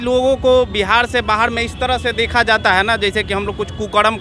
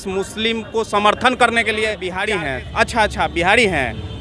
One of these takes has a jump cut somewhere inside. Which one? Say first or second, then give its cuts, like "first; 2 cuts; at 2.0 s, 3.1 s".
second; 1 cut; at 2.2 s